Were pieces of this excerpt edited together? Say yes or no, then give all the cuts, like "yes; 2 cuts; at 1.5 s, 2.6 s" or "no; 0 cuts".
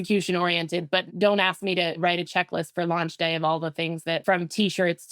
yes; 3 cuts; at 1.1 s, 2.0 s, 4.2 s